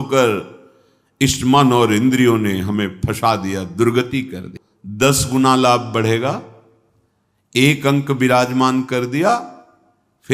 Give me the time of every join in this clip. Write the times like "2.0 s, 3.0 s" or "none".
4.4 s